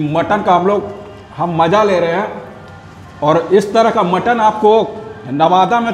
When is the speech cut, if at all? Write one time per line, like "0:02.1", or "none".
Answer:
none